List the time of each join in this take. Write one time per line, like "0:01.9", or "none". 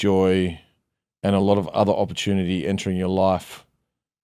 none